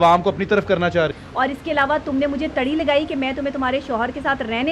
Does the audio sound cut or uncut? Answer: cut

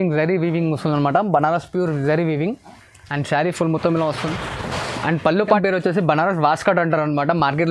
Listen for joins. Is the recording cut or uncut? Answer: cut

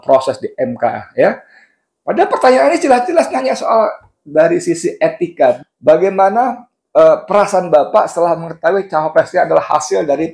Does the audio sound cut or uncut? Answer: cut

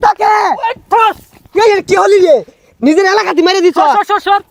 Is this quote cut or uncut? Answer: uncut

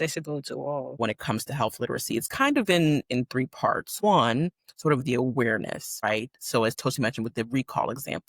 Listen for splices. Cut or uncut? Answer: cut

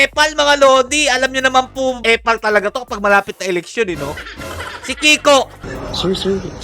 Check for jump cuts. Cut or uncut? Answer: uncut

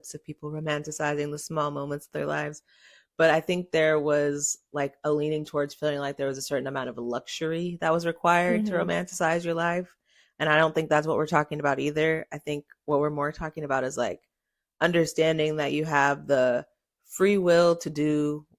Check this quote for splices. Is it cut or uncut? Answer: uncut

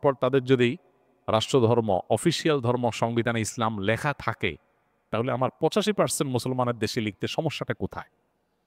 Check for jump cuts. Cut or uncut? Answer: uncut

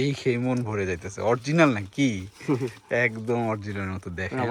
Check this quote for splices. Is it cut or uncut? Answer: uncut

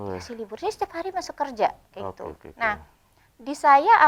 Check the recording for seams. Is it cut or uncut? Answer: uncut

